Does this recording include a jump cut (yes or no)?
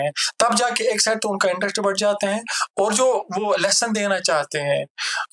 no